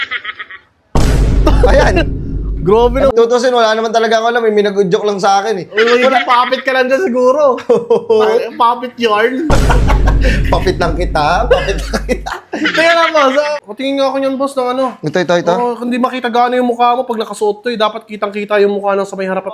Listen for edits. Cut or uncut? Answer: cut